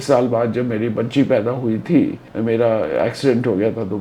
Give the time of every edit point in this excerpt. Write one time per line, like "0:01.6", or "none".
0:02.3